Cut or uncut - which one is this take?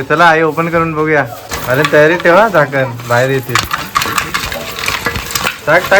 cut